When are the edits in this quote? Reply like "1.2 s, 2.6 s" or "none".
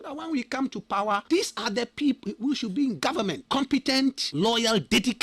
1.2 s, 2.2 s, 3.4 s, 4.2 s